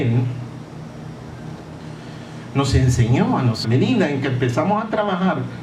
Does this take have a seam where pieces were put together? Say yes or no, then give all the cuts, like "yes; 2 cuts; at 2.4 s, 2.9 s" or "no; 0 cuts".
no; 0 cuts